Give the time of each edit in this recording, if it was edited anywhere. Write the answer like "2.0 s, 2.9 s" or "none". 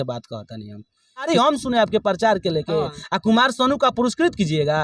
1.3 s